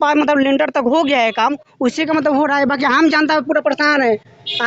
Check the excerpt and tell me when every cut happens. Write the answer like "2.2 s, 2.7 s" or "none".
none